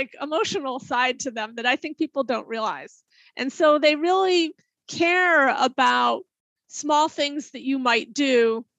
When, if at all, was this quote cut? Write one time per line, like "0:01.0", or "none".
none